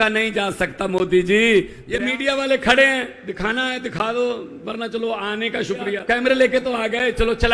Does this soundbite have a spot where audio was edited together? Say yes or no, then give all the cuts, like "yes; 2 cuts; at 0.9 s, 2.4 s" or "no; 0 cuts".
yes; 2 cuts; at 1.8 s, 6.0 s